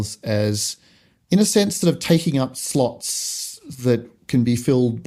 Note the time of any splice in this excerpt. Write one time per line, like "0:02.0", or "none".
none